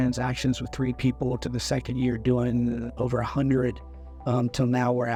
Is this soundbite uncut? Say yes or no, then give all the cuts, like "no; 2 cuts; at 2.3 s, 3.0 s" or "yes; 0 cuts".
yes; 0 cuts